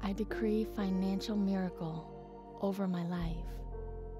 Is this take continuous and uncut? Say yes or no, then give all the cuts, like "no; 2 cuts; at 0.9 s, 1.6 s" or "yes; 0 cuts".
no; 1 cut; at 3.3 s